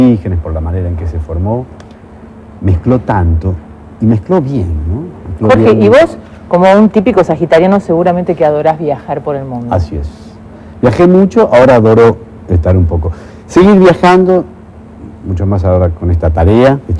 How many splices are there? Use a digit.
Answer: 1